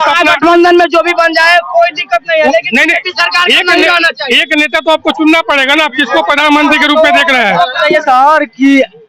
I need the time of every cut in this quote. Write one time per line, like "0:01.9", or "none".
0:07.8